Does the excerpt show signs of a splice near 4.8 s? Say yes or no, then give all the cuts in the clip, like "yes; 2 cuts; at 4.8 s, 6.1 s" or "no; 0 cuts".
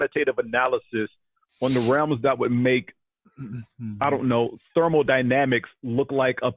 no; 0 cuts